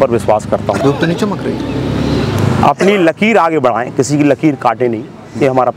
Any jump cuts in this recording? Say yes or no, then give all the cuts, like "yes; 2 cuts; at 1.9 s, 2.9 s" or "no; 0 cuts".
no; 0 cuts